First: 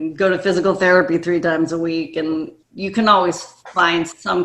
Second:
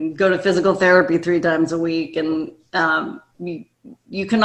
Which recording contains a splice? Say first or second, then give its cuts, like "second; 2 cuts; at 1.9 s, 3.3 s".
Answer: first; 1 cut; at 2.6 s